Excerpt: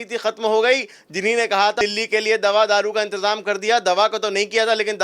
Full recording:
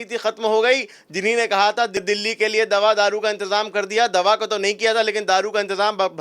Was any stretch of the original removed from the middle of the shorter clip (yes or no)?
yes